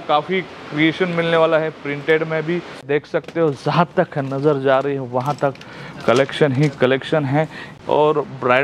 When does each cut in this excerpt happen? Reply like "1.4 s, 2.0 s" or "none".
2.8 s, 7.6 s